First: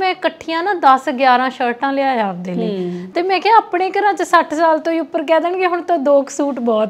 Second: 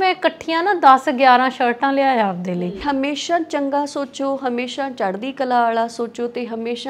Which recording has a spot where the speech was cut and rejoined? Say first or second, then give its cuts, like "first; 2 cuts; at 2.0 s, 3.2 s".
second; 1 cut; at 2.7 s